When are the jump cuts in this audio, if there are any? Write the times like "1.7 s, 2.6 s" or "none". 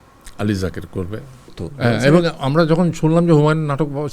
1.6 s